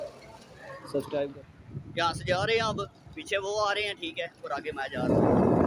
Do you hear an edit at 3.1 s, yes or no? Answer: no